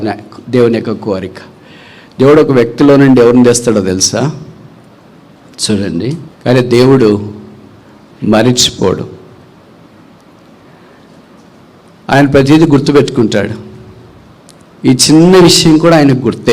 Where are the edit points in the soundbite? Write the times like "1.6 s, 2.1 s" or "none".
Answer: 6.3 s